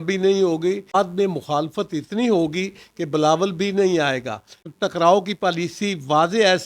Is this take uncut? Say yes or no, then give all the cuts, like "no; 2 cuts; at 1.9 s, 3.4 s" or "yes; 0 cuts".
no; 2 cuts; at 0.9 s, 4.5 s